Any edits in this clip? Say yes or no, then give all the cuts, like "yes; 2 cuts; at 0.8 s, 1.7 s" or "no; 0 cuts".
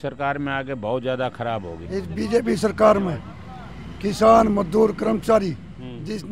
yes; 1 cut; at 1.8 s